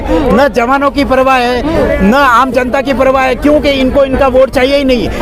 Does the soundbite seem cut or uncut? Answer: uncut